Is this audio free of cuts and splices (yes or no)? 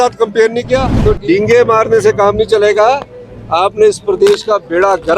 no